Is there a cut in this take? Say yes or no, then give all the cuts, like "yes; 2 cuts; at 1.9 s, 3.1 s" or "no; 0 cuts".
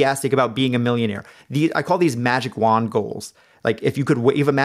no; 0 cuts